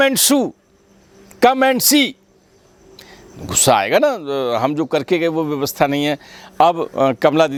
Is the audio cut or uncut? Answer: uncut